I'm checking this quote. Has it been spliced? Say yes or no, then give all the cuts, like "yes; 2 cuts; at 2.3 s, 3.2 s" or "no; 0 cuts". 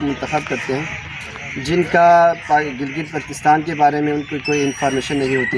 no; 0 cuts